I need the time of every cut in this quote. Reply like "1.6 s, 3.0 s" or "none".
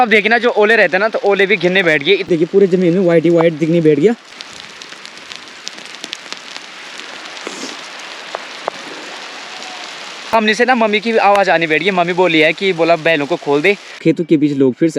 2.3 s, 4.3 s, 10.3 s, 14.0 s